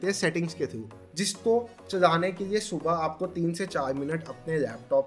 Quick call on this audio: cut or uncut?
cut